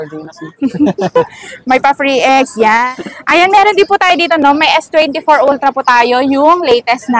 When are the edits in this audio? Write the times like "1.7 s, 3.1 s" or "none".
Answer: 2.8 s